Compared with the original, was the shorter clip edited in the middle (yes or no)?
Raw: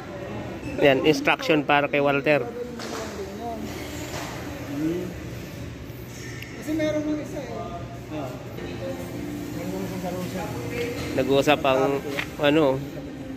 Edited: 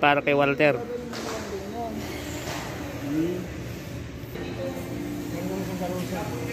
yes